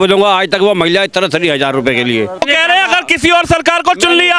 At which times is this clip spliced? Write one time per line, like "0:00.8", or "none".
0:02.5